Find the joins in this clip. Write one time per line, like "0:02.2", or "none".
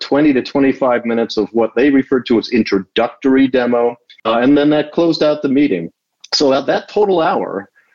0:04.1